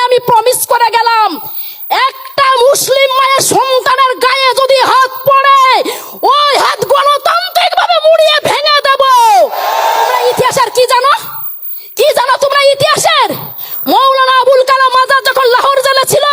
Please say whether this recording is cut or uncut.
cut